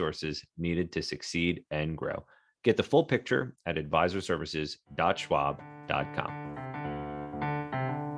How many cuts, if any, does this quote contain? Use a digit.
1